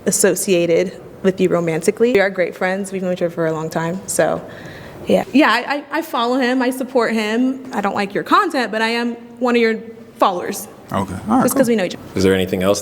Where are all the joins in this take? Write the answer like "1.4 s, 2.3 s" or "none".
2.1 s, 5.3 s, 12.0 s